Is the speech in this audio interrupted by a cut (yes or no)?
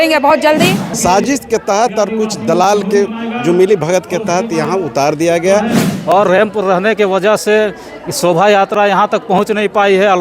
yes